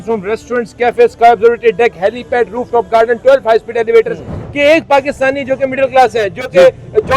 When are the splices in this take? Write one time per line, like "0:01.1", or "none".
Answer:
0:04.4

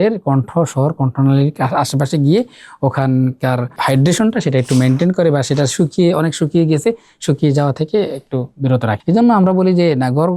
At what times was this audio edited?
0:03.8
0:09.0

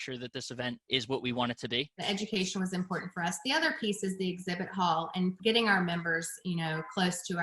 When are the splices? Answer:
0:00.8
0:02.0
0:05.4

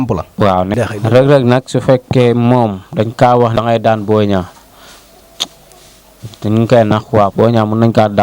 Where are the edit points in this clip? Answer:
0:00.7
0:03.6
0:07.1

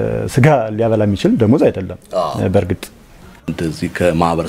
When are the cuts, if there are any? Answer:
0:03.5

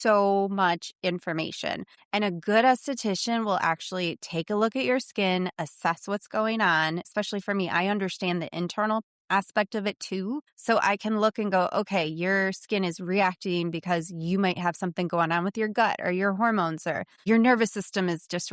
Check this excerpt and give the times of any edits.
0:01.9
0:07.1
0:10.5
0:17.2

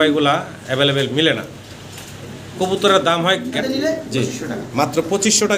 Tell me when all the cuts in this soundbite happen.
0:03.6

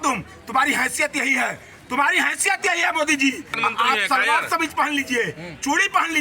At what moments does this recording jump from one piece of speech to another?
0:03.6

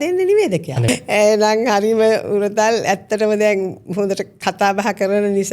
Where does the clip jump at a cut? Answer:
0:00.9
0:04.4

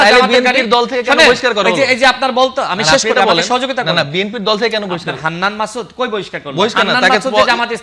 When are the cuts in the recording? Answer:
none

